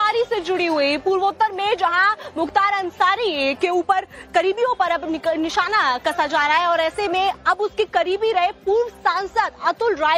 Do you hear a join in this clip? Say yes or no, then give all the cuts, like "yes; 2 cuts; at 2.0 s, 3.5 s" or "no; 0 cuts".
yes; 1 cut; at 5.2 s